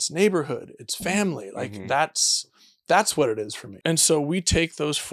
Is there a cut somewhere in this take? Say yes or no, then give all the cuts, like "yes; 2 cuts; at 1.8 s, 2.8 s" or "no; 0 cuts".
yes; 1 cut; at 3.6 s